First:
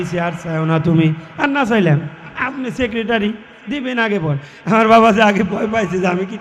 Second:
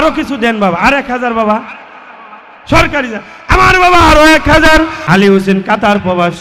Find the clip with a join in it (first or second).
second